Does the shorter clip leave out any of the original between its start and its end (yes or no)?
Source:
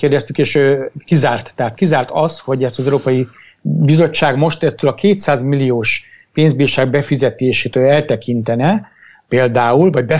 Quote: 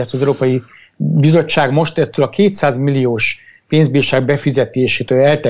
no